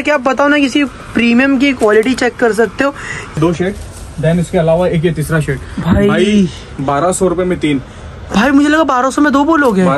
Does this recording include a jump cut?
yes; 1 cut; at 3.4 s

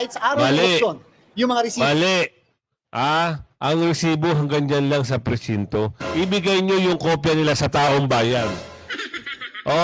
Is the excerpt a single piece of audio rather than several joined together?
yes; 0 cuts

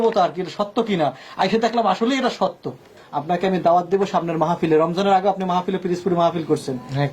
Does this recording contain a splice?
yes; 1 cut; at 3.0 s

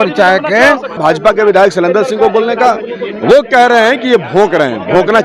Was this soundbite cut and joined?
yes; 1 cut; at 1.0 s

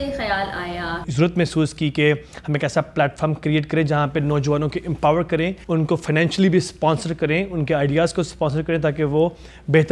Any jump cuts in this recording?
yes; 2 cuts; at 1.1 s, 5.6 s

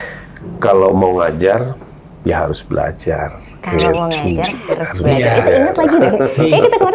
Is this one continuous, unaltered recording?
yes; 0 cuts

